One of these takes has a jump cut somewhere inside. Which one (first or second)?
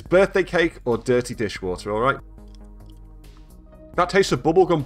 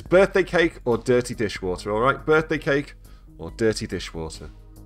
first